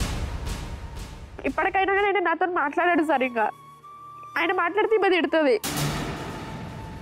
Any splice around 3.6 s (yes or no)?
yes